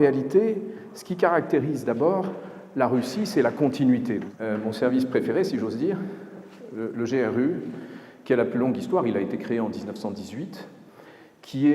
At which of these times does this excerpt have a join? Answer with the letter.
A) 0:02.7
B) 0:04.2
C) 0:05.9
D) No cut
B